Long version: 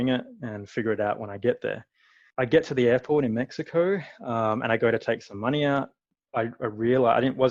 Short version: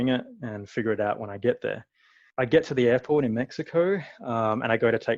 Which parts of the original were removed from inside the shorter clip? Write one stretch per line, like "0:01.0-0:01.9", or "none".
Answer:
none